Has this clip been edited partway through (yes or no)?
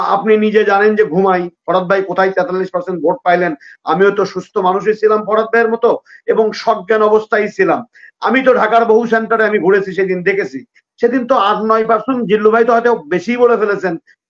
no